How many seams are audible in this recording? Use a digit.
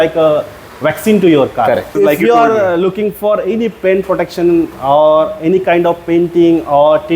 1